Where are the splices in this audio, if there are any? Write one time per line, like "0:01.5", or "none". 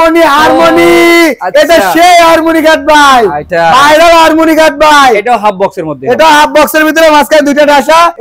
none